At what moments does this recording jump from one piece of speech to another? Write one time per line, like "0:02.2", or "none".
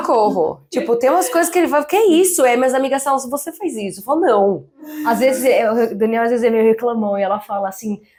none